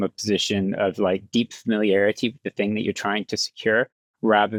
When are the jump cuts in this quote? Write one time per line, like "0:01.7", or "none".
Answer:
none